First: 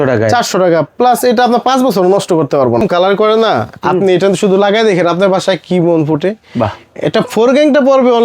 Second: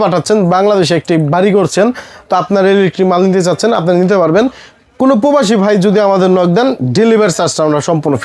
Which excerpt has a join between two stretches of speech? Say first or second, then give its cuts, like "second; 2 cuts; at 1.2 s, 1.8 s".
first; 1 cut; at 2.8 s